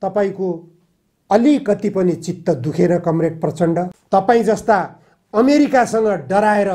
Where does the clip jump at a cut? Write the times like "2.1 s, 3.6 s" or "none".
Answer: 3.9 s